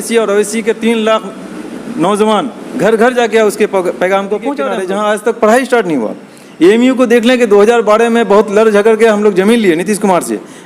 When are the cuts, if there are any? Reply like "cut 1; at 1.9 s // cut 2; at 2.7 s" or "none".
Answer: cut 1; at 4.7 s